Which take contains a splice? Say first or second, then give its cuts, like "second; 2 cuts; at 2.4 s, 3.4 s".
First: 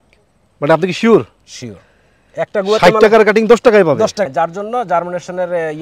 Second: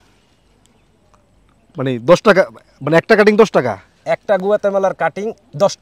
first; 1 cut; at 4.2 s